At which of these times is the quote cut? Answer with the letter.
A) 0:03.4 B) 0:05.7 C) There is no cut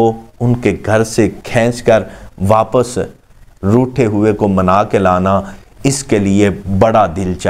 C